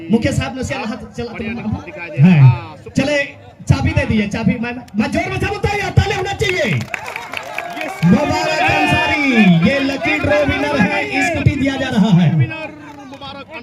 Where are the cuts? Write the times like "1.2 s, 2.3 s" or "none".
none